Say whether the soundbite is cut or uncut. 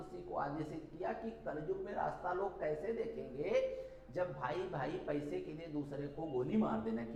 uncut